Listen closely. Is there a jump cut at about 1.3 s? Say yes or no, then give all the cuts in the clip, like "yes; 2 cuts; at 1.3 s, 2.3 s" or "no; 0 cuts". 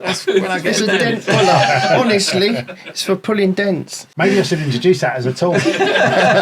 no; 1 cut; at 4.0 s